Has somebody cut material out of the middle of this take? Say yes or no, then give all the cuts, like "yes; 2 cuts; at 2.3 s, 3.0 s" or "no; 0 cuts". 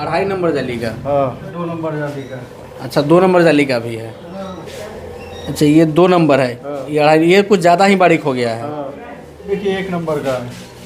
yes; 3 cuts; at 1.6 s, 4.6 s, 9.5 s